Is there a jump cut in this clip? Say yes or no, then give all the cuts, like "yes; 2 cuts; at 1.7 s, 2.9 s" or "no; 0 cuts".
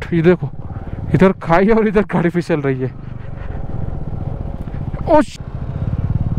yes; 1 cut; at 5.3 s